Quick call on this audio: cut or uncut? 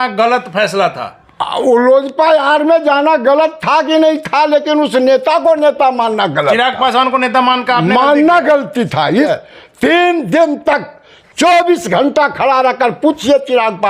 cut